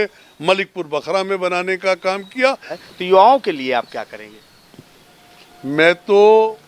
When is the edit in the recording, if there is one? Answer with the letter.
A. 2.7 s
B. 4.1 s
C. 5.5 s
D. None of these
A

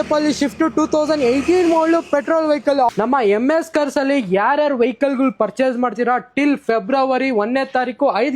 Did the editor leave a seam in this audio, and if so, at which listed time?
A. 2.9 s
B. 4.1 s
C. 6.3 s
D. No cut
A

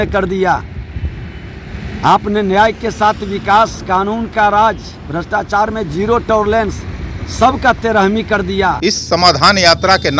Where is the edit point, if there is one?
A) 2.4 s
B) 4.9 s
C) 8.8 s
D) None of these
C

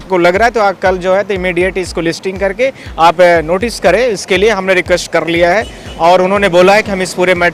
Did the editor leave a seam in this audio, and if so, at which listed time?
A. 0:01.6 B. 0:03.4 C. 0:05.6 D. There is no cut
D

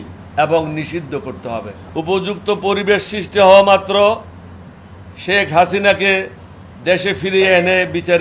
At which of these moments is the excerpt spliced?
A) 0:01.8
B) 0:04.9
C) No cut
A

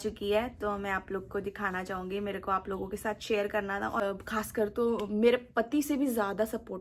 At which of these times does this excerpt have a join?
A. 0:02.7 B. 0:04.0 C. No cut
B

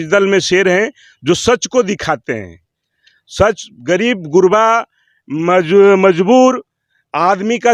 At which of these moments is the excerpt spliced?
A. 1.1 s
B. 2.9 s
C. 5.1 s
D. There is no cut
D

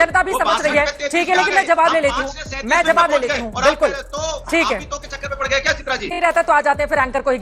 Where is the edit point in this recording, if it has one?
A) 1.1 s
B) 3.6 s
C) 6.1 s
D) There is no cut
C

